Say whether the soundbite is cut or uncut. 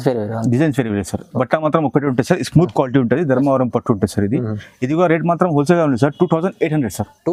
uncut